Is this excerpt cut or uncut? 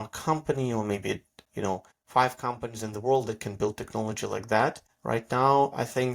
cut